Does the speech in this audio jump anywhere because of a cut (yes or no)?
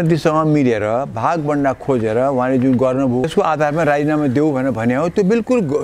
yes